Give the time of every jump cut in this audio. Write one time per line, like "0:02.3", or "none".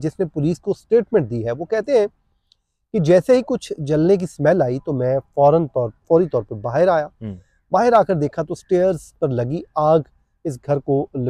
none